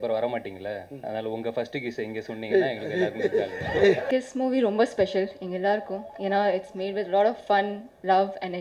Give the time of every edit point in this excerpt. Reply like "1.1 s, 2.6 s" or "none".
4.0 s